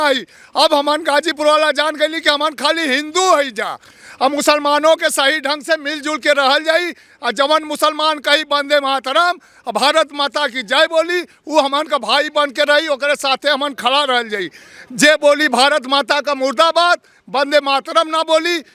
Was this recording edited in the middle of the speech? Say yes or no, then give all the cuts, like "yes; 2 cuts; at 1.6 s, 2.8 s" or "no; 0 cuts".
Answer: no; 0 cuts